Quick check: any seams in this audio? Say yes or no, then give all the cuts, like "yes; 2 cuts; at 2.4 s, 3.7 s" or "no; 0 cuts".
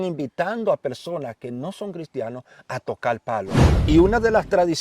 yes; 1 cut; at 3.6 s